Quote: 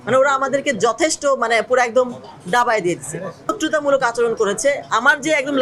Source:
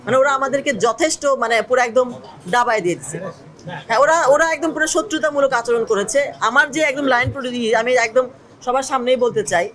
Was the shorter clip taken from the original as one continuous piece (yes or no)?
no